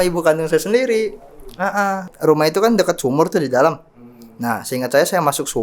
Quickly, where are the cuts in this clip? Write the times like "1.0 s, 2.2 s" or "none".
2.1 s